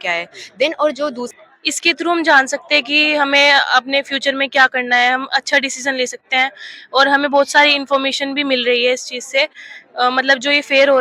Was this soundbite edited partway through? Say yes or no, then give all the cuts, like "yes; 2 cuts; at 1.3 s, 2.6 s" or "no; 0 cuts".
yes; 1 cut; at 1.2 s